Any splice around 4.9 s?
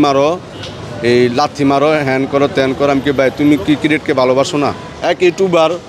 yes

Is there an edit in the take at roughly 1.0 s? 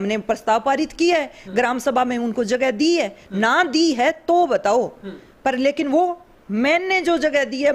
no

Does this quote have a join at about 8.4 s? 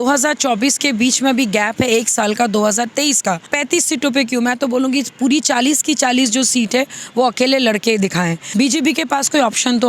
yes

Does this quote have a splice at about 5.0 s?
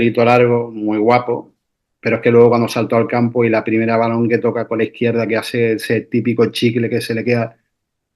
no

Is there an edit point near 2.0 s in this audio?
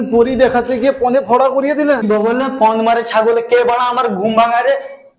yes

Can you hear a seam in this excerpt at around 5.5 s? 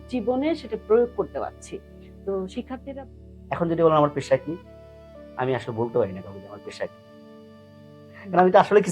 no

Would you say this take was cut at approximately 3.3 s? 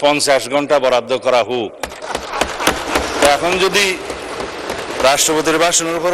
no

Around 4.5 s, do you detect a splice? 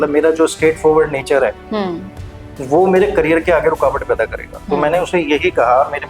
yes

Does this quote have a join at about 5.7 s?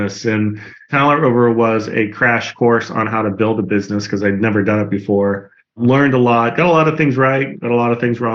no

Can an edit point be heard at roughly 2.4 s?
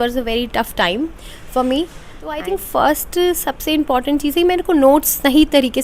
yes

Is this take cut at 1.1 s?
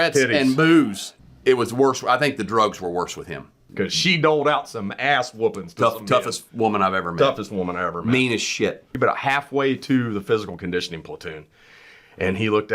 yes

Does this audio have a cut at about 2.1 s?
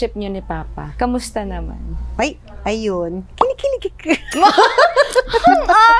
no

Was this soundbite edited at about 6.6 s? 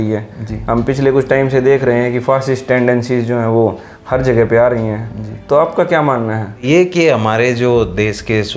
yes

